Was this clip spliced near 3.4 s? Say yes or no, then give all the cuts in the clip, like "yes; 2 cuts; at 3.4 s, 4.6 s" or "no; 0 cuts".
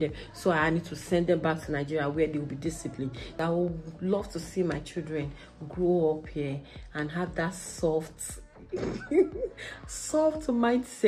yes; 1 cut; at 3.4 s